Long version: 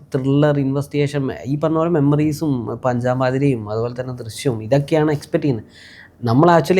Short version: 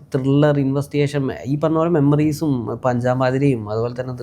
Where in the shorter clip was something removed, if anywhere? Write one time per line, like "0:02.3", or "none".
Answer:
none